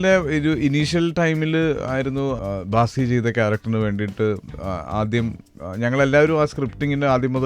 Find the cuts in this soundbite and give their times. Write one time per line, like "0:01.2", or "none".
0:02.4